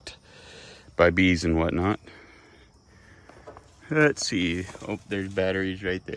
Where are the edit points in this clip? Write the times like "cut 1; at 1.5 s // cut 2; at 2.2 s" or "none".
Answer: none